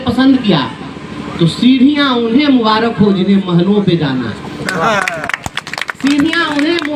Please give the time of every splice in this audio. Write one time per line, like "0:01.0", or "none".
none